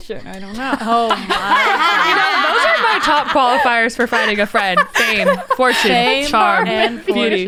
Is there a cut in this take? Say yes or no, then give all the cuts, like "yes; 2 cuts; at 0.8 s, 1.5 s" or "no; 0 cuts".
no; 0 cuts